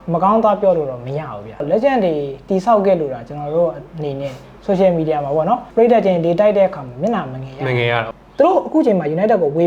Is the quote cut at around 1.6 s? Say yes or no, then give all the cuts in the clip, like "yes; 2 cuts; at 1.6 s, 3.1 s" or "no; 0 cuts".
yes; 4 cuts; at 1.6 s, 4.5 s, 5.7 s, 8.0 s